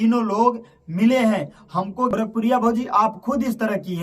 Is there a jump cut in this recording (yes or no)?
yes